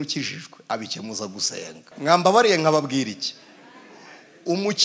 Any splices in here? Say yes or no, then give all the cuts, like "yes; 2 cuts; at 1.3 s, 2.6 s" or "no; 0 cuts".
yes; 1 cut; at 1.8 s